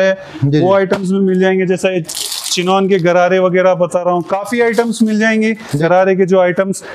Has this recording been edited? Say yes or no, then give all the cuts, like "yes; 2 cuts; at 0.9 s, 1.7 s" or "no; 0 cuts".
yes; 1 cut; at 5.8 s